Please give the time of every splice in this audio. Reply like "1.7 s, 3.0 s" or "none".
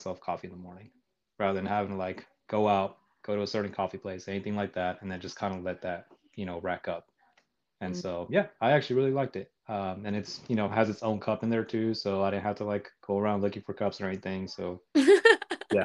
none